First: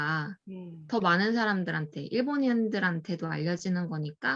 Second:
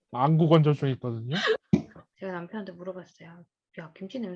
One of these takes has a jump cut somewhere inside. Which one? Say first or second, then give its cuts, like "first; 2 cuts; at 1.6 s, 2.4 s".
second; 1 cut; at 2.0 s